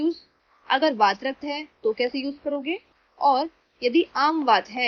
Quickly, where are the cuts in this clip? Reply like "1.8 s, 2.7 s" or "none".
none